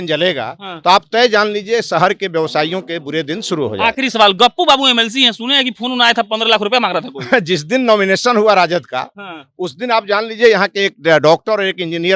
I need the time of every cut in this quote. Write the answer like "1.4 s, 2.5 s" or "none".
none